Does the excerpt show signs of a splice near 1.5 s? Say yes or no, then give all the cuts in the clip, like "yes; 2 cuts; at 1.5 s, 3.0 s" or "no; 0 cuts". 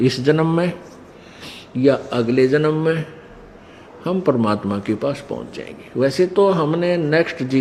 no; 0 cuts